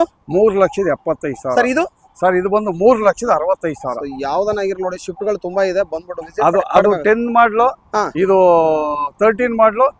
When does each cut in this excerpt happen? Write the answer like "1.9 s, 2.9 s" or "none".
none